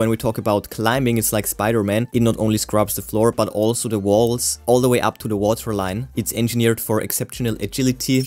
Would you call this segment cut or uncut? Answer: uncut